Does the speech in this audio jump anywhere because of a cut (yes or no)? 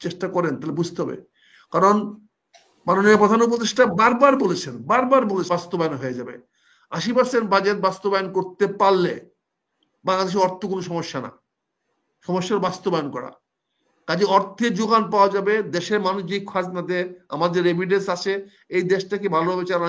yes